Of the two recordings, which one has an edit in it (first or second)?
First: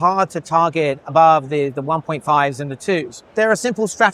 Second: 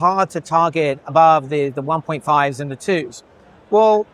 first